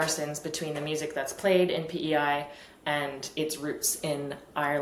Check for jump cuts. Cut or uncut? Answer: uncut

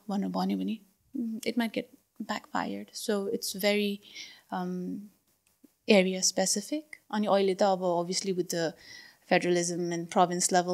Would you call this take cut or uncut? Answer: uncut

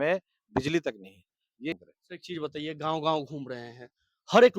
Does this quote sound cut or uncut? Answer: cut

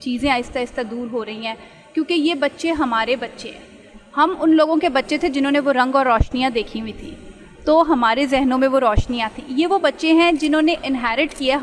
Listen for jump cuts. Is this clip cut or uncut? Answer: uncut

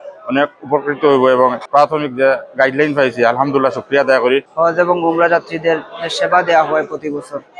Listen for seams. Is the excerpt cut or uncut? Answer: cut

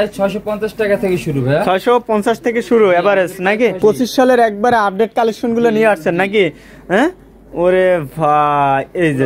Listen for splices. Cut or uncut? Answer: cut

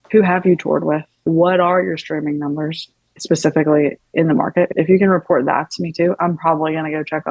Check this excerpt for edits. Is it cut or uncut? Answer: cut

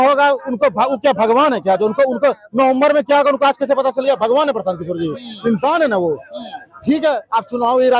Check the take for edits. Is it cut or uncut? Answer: uncut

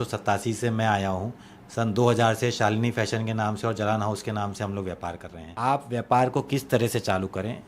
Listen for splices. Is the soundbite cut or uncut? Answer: cut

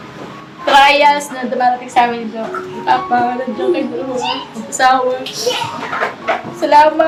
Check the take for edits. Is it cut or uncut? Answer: uncut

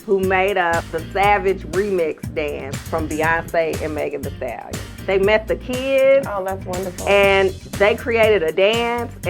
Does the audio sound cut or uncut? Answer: cut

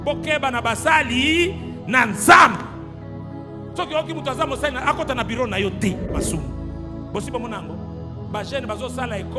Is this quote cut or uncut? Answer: cut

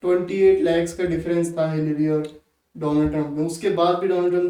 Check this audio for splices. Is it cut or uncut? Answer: uncut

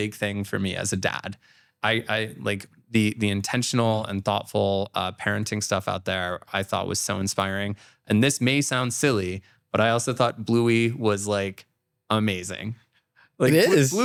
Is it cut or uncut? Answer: uncut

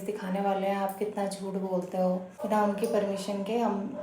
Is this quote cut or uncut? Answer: cut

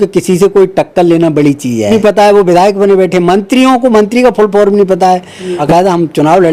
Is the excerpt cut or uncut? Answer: cut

